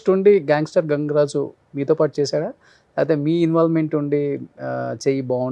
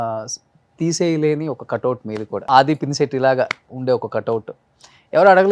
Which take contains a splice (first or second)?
second